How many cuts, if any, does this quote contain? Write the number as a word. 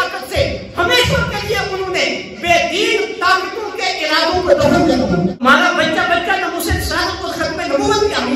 one